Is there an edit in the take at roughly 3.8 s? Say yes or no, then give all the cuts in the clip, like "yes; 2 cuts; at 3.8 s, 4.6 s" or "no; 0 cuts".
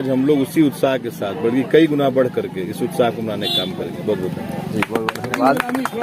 no; 0 cuts